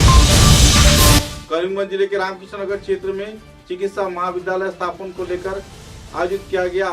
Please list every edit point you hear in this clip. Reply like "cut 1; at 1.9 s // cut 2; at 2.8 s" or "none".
cut 1; at 1.1 s